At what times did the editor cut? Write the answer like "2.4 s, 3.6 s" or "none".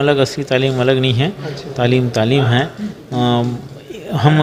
none